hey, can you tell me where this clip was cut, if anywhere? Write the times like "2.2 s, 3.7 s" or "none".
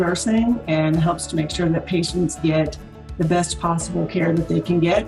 none